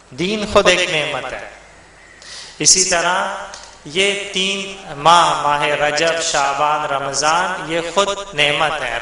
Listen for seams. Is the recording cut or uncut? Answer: uncut